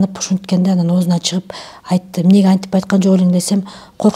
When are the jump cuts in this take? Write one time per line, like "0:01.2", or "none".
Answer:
none